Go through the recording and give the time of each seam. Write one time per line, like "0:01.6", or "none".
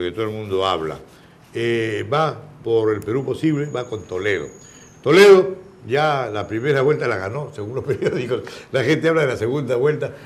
0:09.0